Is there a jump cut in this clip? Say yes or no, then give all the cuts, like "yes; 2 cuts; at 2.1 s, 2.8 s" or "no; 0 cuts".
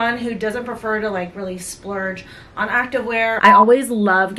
yes; 1 cut; at 3.4 s